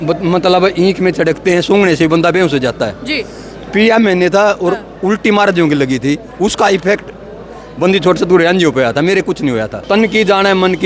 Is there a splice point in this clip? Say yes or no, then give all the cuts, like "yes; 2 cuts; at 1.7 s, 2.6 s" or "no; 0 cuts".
yes; 1 cut; at 9.7 s